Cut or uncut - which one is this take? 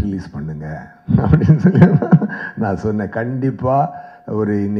uncut